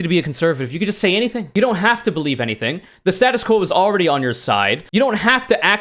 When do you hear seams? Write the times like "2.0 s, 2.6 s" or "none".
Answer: 1.4 s, 4.9 s